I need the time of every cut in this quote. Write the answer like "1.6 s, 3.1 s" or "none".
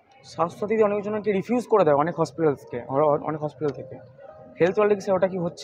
none